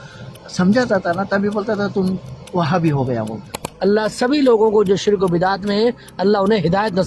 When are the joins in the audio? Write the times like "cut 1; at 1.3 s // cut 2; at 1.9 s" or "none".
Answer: cut 1; at 3.6 s